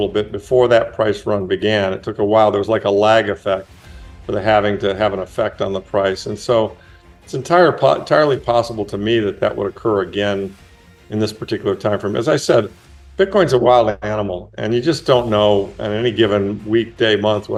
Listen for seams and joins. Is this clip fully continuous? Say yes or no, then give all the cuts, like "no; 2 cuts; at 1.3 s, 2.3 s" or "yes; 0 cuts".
yes; 0 cuts